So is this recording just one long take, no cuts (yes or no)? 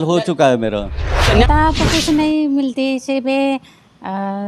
no